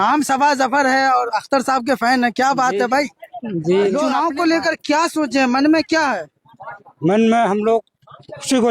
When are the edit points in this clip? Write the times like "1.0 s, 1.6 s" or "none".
4.1 s